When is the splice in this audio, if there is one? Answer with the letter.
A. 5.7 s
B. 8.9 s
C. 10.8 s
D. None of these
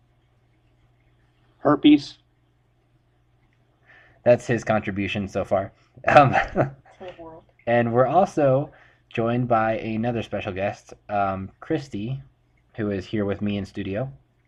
D